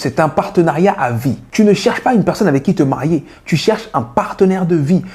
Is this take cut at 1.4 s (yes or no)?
yes